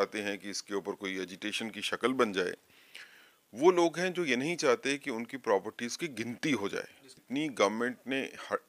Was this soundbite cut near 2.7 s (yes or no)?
no